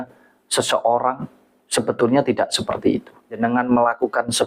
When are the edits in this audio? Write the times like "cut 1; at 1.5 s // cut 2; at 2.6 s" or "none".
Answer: cut 1; at 3.4 s